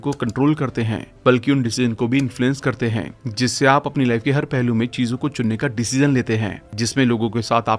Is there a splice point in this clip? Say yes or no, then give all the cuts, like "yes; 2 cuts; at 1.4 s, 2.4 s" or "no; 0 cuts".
no; 0 cuts